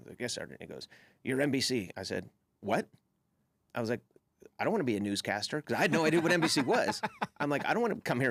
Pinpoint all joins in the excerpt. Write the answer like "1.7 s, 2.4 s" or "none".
none

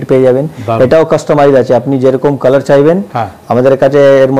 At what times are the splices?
none

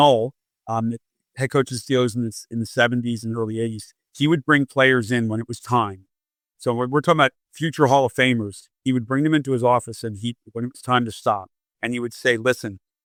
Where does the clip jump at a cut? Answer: none

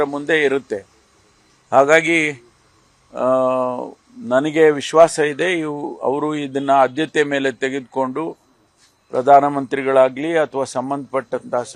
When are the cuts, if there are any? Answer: 1.1 s

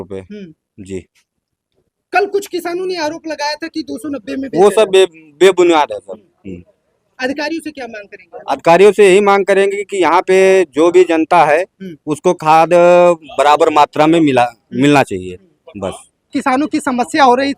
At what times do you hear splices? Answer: none

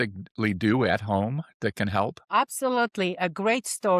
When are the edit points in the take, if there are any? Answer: 2.3 s

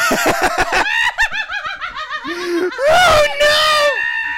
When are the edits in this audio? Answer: none

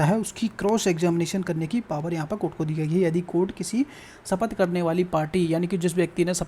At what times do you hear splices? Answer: none

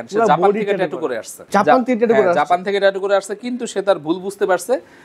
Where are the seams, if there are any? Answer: none

